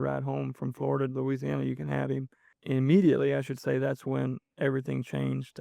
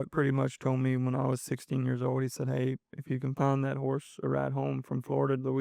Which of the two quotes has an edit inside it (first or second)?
first